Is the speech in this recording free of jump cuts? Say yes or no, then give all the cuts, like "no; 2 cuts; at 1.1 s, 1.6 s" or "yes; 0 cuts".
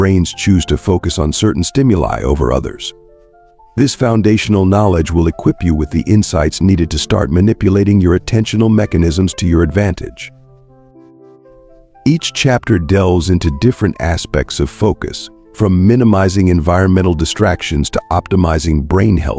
yes; 0 cuts